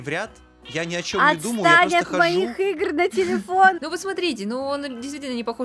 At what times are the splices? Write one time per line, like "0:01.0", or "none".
0:03.8